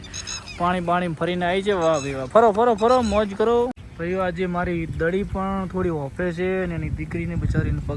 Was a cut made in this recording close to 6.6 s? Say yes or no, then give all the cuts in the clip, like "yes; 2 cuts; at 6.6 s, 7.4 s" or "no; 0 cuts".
no; 1 cut; at 3.9 s